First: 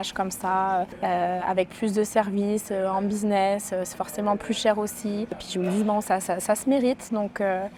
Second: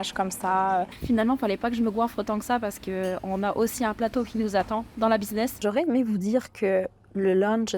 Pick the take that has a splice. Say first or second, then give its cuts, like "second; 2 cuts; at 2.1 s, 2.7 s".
second; 2 cuts; at 0.9 s, 5.6 s